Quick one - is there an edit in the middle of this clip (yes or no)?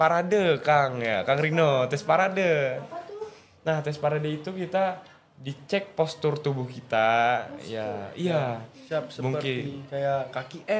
no